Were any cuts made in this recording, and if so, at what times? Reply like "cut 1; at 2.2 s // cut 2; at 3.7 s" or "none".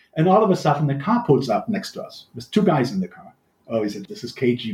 cut 1; at 3.8 s